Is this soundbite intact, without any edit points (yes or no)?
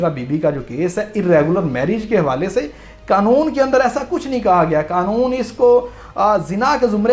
yes